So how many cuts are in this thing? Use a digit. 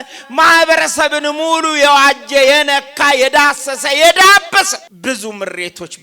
1